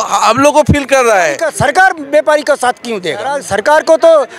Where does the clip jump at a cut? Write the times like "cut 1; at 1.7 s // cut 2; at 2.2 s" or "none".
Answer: cut 1; at 1.4 s // cut 2; at 3.4 s